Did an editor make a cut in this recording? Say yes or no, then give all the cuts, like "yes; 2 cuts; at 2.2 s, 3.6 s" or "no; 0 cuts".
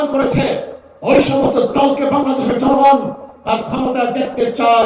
no; 0 cuts